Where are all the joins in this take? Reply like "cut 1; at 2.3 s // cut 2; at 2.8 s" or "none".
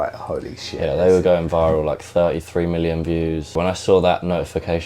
cut 1; at 3.5 s